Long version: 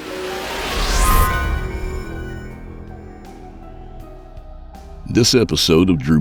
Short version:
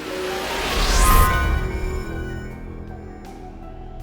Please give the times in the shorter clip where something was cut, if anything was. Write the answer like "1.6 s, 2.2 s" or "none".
none